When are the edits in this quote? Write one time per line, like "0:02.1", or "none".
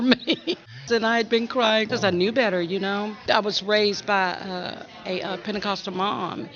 0:00.9
0:01.9
0:03.2